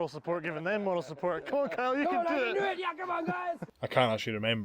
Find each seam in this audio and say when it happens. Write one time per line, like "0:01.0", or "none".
0:03.7